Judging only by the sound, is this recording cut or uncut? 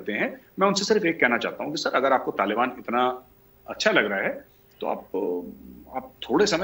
uncut